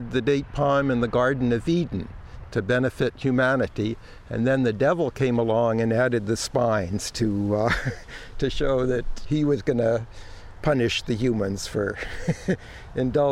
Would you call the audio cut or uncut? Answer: cut